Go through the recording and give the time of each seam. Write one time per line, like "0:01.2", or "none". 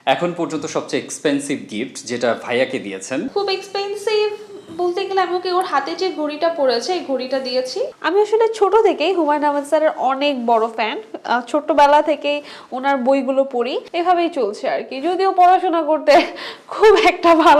0:08.0
0:13.8

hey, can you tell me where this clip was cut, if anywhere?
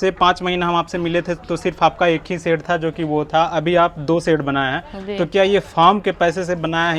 none

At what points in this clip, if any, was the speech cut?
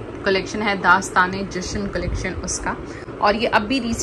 none

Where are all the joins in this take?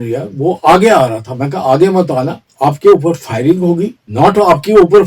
0:02.4
0:04.0

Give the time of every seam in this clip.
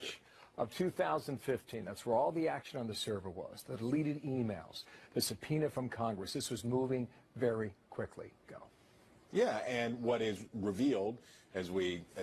0:01.1

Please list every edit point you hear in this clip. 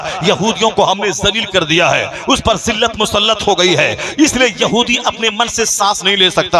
none

